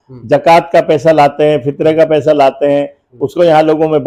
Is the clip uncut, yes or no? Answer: yes